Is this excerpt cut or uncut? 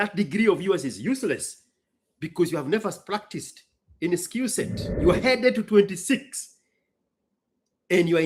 cut